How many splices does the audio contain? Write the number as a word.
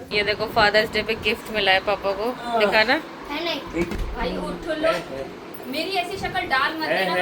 one